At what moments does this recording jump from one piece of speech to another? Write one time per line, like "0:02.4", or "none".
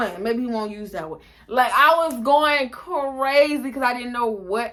none